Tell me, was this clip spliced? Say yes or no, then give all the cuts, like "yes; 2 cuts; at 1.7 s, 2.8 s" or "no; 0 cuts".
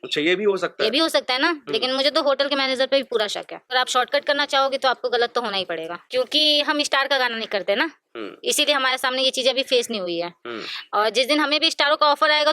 yes; 2 cuts; at 3.7 s, 6.0 s